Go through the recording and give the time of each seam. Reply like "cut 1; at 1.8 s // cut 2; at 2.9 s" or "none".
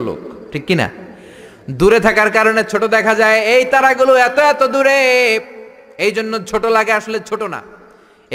none